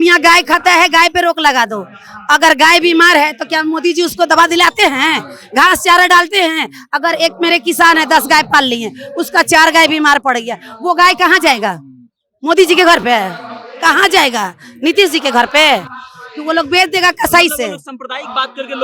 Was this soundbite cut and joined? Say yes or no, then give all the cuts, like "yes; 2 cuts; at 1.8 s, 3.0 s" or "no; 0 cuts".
no; 0 cuts